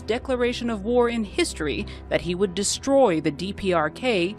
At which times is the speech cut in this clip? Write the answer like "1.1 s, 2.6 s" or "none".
1.3 s